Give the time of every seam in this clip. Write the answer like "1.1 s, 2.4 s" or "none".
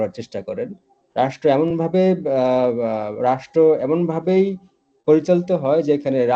none